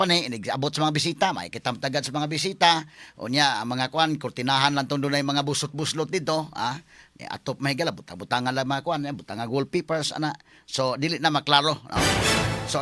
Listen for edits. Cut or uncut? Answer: uncut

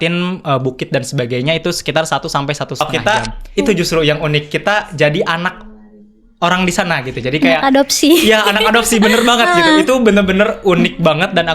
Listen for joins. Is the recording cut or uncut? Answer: cut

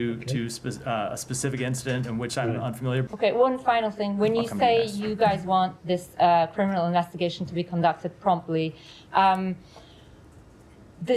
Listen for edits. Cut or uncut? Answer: cut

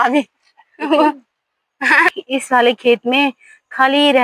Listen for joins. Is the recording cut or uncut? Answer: cut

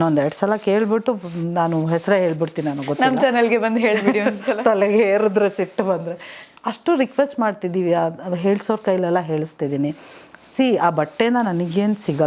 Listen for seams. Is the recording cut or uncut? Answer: uncut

